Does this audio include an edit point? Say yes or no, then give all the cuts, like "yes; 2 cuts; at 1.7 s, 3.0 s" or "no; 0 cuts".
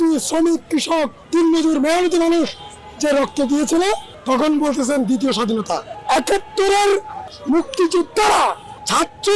no; 0 cuts